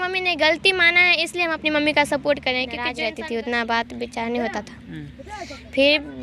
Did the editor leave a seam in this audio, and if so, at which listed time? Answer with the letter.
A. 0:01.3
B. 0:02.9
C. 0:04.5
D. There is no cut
B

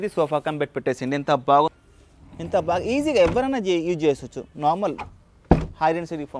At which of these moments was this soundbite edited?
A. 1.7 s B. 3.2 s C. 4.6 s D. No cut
A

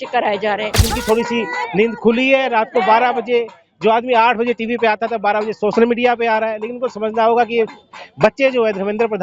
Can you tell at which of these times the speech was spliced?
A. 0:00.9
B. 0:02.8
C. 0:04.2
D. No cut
A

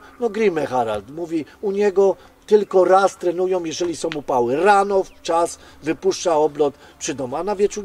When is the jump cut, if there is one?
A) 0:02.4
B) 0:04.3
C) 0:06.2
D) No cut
D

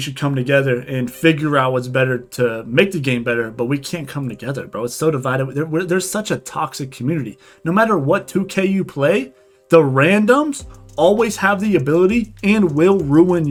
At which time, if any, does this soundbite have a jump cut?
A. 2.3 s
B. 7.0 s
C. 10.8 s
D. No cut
D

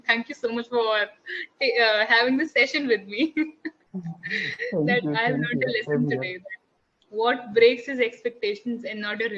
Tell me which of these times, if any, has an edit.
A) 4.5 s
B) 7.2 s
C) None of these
C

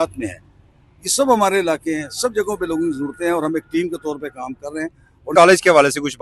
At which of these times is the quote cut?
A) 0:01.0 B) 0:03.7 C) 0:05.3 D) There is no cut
C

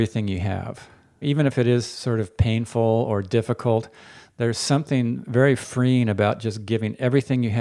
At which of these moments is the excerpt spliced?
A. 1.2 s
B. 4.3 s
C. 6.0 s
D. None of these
A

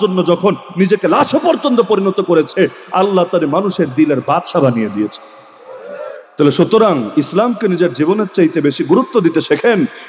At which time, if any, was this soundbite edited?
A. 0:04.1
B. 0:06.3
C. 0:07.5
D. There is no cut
D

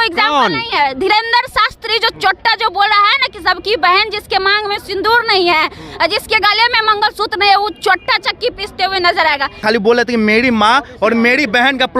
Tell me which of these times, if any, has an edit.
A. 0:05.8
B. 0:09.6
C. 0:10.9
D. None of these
B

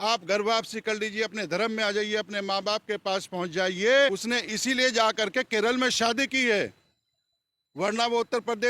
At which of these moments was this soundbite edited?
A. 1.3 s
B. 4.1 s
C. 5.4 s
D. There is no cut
B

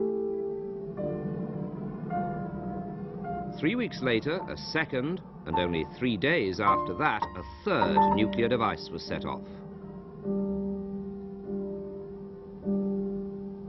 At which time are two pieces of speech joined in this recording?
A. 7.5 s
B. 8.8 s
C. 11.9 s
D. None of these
A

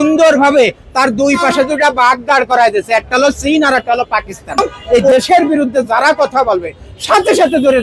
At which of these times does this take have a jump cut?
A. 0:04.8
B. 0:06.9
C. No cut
A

